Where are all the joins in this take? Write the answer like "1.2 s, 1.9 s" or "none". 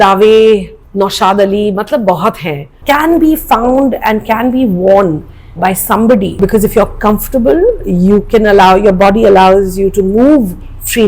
2.7 s, 6.3 s